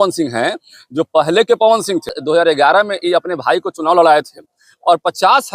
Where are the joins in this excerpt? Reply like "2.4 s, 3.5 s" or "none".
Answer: 2.2 s